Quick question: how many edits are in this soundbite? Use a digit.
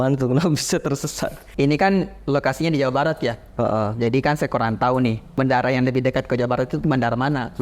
2